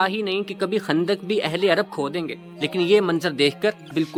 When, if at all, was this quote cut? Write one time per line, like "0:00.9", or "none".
none